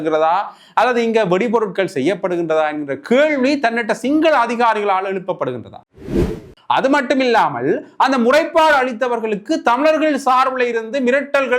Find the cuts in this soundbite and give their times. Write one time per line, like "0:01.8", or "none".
0:06.2

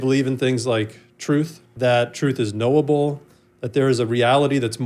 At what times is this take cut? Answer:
0:01.7

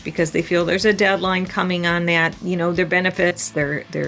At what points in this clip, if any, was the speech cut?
0:02.4

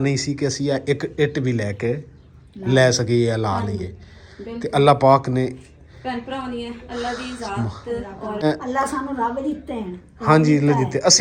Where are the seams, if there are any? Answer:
0:08.4

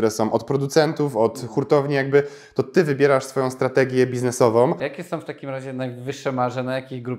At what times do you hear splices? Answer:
0:04.9

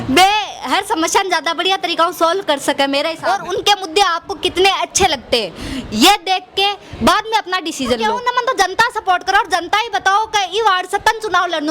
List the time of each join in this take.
0:03.2
0:08.0

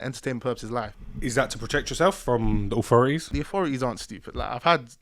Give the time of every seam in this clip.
0:01.0
0:03.3

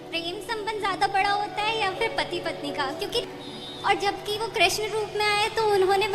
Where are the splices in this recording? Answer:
0:03.2

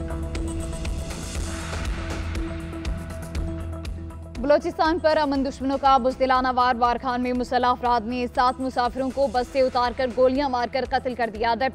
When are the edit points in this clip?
0:03.7

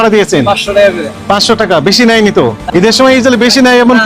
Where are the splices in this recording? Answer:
0:02.6

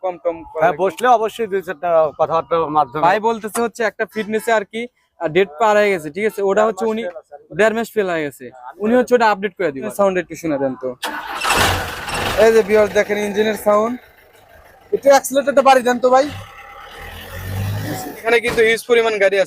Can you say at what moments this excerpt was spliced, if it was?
0:02.9
0:09.9
0:18.2

